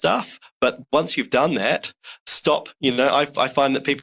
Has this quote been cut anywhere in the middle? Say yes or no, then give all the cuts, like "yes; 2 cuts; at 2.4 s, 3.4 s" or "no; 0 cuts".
no; 0 cuts